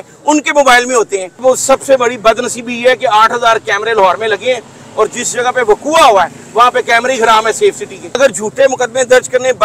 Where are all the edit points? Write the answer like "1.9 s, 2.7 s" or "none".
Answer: 1.4 s, 8.1 s